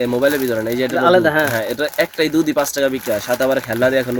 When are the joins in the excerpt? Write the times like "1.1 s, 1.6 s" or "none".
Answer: none